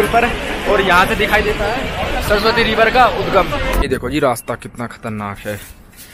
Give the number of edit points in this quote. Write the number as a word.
one